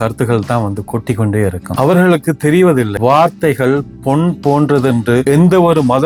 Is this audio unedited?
yes; 0 cuts

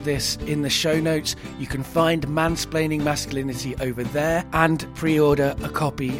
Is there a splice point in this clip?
yes; 1 cut; at 4.7 s

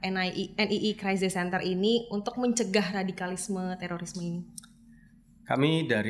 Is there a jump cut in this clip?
no; 0 cuts

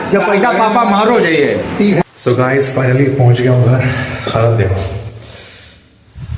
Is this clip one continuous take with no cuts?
no; 1 cut; at 2.0 s

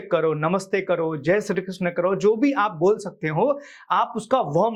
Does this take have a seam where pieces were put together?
no; 0 cuts

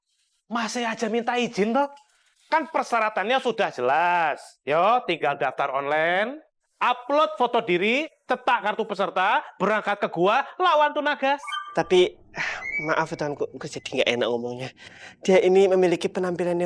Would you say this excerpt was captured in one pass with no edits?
yes; 0 cuts

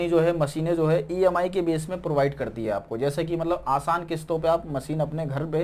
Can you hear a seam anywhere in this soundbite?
no; 0 cuts

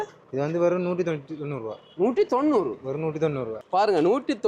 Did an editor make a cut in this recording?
yes; 1 cut; at 3.5 s

